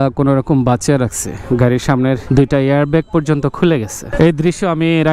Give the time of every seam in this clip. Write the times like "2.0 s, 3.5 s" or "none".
1.3 s, 4.0 s